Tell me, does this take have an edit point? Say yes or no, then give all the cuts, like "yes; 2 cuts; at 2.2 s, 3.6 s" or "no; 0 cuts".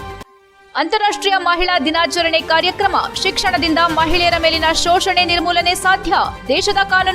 no; 0 cuts